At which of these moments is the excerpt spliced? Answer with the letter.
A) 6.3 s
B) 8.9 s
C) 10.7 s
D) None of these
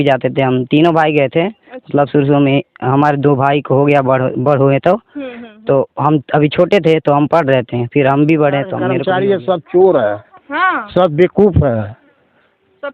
B